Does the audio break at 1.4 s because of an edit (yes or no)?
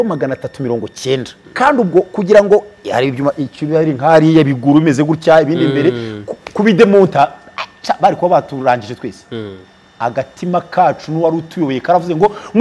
yes